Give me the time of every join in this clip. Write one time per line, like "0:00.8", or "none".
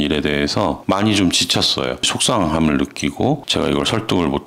none